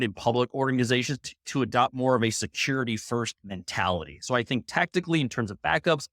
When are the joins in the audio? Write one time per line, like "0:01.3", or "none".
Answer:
none